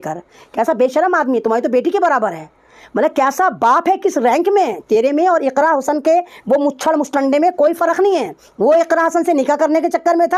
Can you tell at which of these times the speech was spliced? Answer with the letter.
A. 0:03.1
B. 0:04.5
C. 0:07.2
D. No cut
D